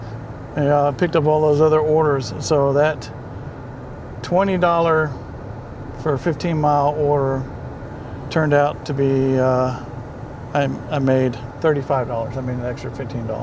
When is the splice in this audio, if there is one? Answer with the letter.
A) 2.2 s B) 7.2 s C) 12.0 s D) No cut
D